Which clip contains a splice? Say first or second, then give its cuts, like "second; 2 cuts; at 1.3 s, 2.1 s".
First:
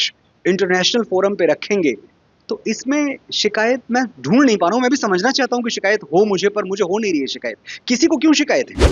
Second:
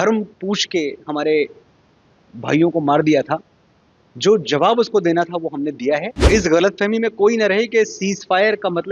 second; 1 cut; at 6.1 s